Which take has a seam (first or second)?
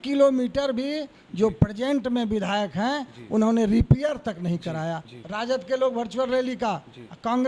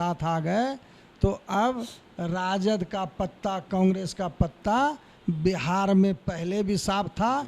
first